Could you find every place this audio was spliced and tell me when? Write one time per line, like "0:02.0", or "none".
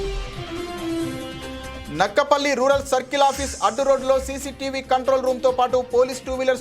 0:01.7